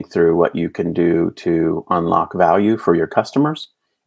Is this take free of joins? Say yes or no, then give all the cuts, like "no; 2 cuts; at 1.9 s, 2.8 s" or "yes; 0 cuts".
yes; 0 cuts